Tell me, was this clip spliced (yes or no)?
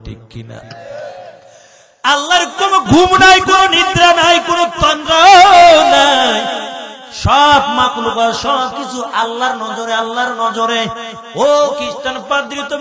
yes